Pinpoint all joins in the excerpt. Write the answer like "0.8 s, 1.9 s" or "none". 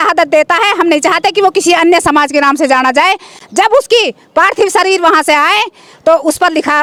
none